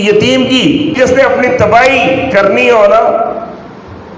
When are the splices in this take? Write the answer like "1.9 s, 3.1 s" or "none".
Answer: 1.0 s